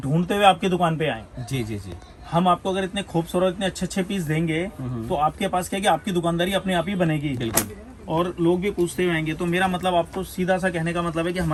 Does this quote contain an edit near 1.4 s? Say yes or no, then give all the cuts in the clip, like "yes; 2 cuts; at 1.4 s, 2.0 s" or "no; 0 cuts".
no; 0 cuts